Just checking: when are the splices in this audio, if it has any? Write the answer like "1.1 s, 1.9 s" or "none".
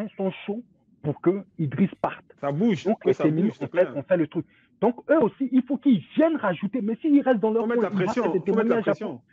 none